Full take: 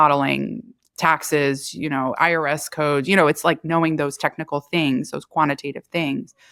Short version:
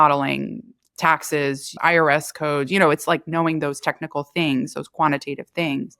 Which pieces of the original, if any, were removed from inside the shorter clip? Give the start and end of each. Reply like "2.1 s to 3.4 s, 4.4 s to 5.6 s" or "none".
1.8 s to 2.1 s